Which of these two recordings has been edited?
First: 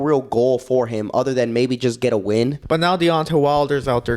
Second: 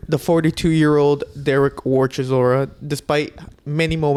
first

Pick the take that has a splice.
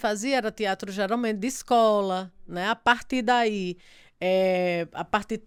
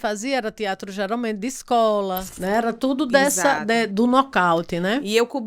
second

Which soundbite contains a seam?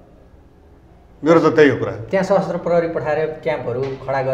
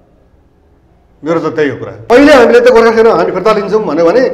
second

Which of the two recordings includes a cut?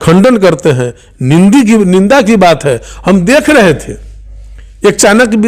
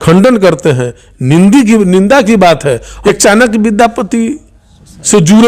second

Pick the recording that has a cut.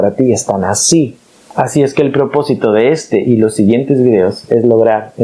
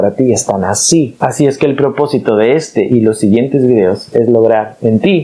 second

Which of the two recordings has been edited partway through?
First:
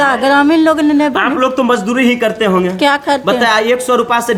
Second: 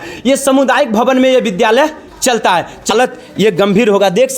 second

